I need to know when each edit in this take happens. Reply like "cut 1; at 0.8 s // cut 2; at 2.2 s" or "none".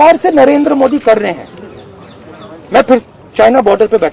cut 1; at 3.0 s